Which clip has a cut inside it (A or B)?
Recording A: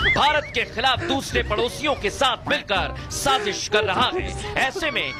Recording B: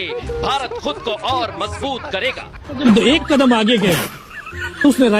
B